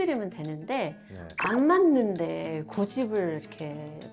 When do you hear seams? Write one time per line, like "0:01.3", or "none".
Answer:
none